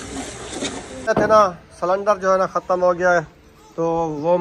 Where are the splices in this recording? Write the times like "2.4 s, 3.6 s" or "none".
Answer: 1.1 s

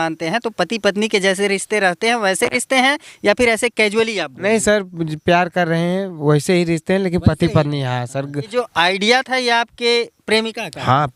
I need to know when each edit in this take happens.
8.5 s

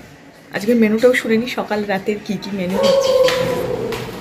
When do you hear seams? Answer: 2.8 s

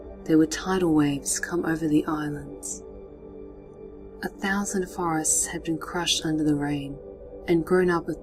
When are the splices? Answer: 5.5 s

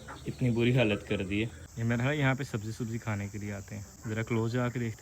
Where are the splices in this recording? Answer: 1.6 s, 3.9 s

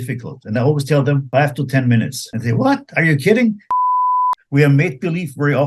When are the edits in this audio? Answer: 1.2 s, 2.2 s, 4.0 s

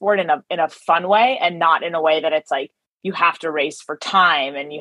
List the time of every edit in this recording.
none

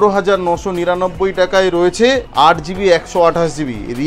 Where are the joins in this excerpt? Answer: 2.3 s

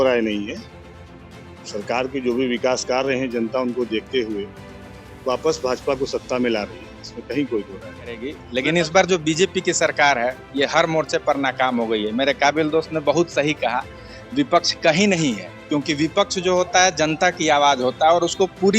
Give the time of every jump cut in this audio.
8.4 s

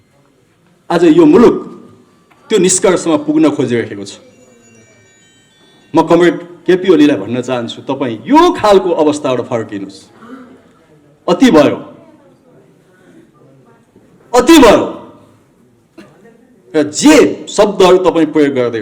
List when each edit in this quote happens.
none

